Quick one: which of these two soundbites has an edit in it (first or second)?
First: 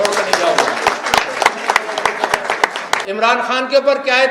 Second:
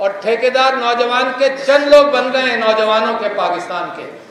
first